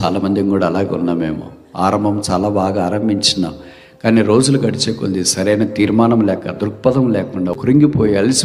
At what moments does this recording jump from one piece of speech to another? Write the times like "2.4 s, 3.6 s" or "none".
7.5 s